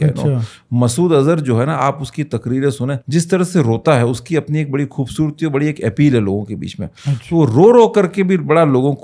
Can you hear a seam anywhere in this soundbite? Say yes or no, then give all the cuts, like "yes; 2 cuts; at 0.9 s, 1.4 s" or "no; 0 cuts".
yes; 1 cut; at 3.0 s